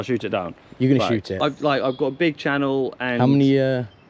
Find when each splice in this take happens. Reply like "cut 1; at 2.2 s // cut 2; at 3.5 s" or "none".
cut 1; at 1.3 s